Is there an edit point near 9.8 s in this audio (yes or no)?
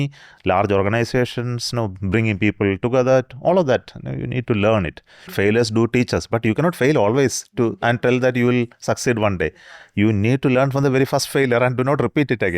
no